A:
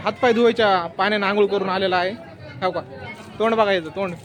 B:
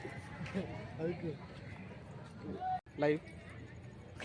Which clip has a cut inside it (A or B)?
B